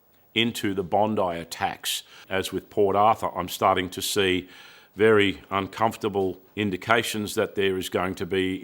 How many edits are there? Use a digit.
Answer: 2